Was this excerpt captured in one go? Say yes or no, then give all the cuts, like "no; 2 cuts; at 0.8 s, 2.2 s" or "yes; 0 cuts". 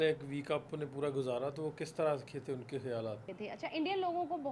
no; 1 cut; at 3.2 s